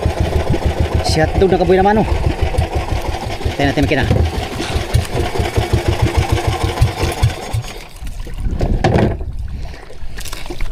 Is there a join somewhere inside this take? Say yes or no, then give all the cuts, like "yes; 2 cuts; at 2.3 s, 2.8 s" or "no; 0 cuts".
no; 0 cuts